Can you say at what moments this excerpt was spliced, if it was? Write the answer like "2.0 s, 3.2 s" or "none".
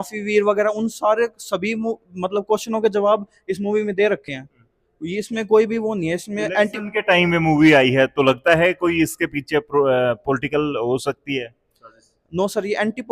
none